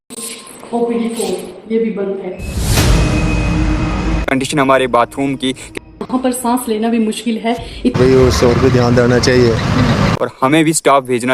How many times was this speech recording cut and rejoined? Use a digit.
1